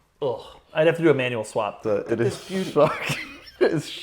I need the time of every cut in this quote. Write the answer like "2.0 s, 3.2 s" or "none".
1.8 s